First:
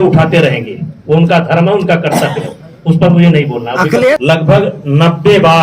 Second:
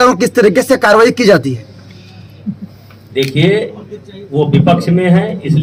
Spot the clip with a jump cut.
first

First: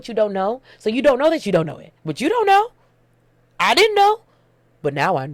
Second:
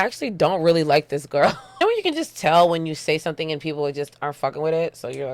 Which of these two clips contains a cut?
second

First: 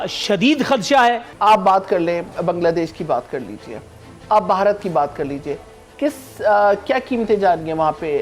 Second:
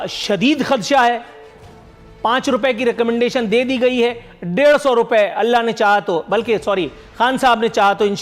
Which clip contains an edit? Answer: first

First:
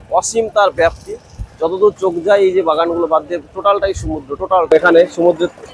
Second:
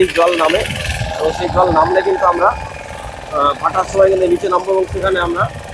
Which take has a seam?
first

